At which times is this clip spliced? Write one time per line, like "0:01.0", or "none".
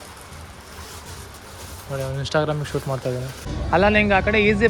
0:03.5